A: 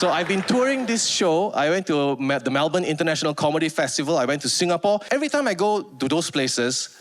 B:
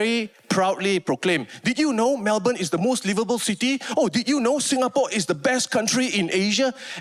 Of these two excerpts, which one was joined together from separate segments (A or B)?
A